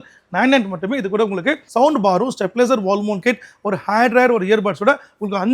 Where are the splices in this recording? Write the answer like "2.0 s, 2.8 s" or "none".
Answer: 1.6 s